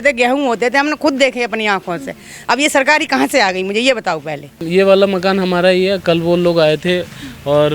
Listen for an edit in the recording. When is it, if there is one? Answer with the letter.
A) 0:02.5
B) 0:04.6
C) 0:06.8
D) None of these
B